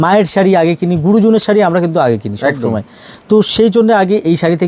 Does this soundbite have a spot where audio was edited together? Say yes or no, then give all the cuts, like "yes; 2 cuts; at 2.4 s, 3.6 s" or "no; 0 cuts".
no; 0 cuts